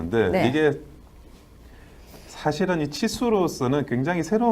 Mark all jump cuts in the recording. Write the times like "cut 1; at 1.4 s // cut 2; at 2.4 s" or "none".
cut 1; at 2.8 s

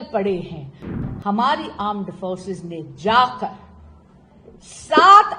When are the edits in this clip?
cut 1; at 0.9 s

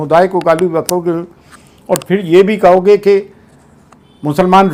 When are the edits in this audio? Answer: none

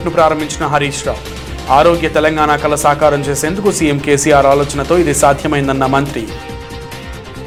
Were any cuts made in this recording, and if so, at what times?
none

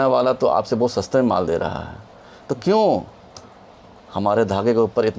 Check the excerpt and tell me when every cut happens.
none

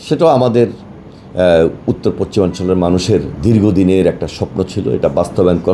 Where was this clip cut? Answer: none

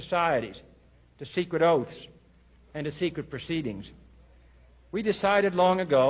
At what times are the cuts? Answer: cut 1; at 2.0 s

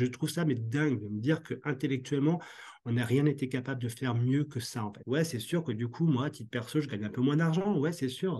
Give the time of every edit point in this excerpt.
cut 1; at 5.0 s

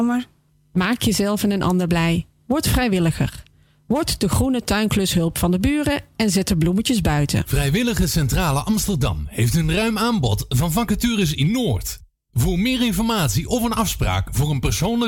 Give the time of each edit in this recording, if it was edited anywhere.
cut 1; at 7.5 s

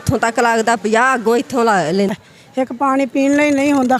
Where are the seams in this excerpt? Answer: cut 1; at 2.2 s

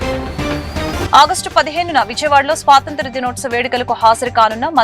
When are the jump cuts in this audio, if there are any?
cut 1; at 1.0 s

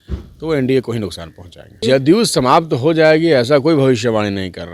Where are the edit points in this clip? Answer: cut 1; at 1.8 s

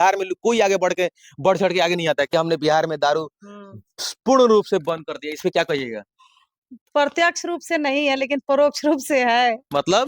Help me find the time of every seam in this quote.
cut 1; at 2.3 s

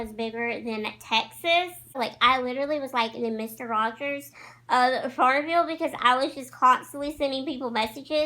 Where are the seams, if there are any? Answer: cut 1; at 2.0 s

